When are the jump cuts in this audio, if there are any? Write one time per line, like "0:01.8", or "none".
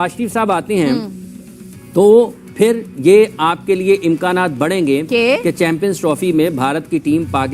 none